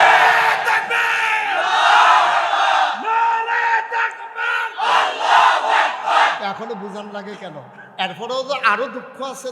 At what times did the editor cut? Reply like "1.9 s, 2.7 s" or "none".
6.4 s